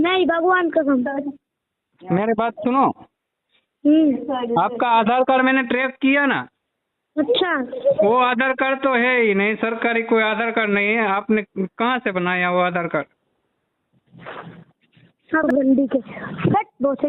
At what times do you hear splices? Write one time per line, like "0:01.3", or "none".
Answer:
0:15.5